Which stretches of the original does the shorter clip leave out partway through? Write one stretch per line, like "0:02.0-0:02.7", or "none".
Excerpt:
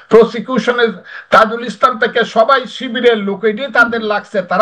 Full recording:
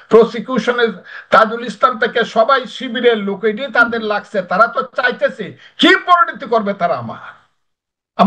none